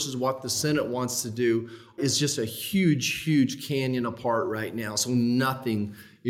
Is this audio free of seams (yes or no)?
no